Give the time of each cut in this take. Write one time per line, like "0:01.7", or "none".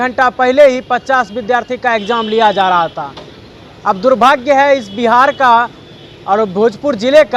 none